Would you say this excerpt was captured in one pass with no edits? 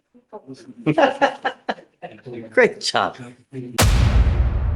no; 1 cut; at 3.7 s

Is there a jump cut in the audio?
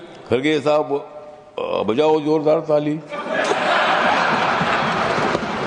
no; 0 cuts

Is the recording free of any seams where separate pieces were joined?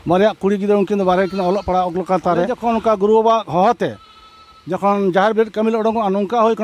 no; 1 cut; at 2.6 s

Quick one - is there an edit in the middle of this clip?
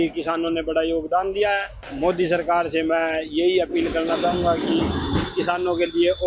yes; 1 cut; at 1.8 s

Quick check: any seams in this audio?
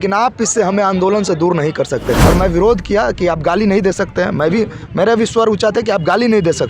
yes; 1 cut; at 2.2 s

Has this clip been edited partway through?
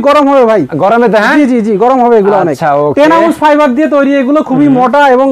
no; 0 cuts

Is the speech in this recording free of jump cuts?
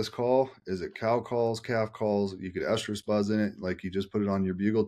yes; 0 cuts

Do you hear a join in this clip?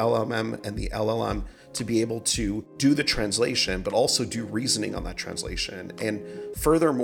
yes; 1 cut; at 2.7 s

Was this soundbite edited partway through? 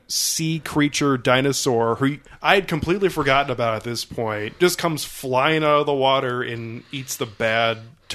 yes; 1 cut; at 2.3 s

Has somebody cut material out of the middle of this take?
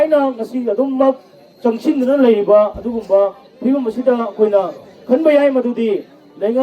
no; 0 cuts

